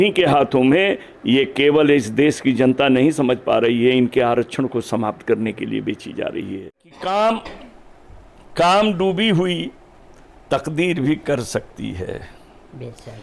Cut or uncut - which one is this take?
cut